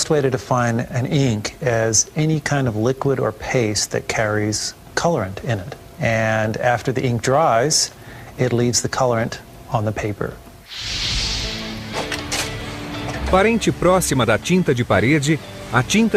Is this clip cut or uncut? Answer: uncut